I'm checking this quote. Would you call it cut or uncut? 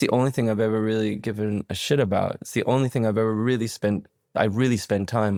uncut